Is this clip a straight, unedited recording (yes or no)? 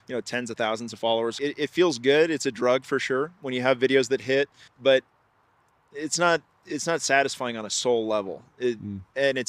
no